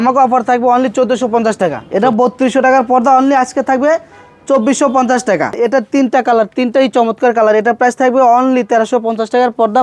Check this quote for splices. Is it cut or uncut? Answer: cut